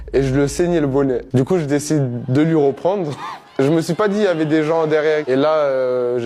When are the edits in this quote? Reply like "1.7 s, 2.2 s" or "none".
5.2 s